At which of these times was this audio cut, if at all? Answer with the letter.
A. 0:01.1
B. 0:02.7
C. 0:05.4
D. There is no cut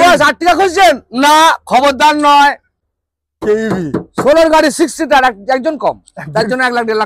B